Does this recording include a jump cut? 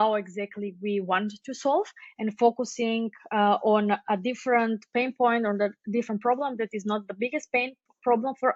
no; 0 cuts

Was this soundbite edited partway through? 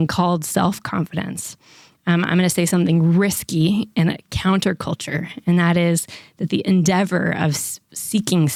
no; 0 cuts

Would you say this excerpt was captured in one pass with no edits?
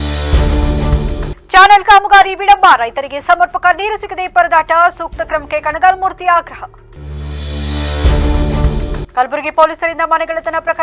no; 1 cut; at 1.3 s

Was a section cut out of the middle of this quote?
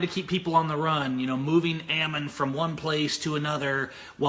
yes; 1 cut; at 1.8 s

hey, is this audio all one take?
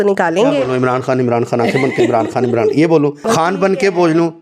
no; 1 cut; at 3.2 s

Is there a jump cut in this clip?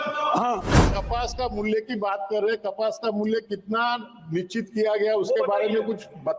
yes; 1 cut; at 0.9 s

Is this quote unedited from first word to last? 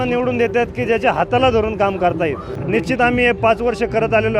no; 1 cut; at 2.5 s

